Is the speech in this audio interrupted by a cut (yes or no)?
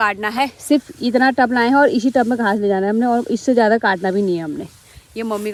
no